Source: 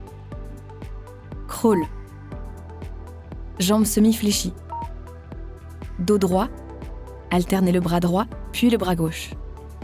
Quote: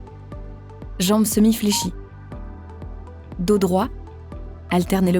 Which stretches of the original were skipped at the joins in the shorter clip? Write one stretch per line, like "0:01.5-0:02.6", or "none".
0:00.9-0:03.5